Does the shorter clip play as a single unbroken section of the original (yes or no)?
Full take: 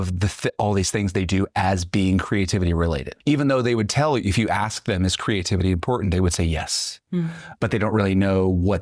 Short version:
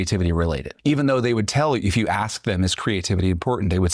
yes